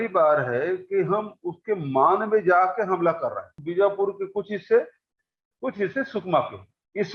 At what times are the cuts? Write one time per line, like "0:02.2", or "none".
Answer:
0:03.6